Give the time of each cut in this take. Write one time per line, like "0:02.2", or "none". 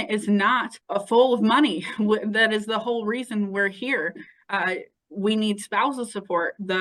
none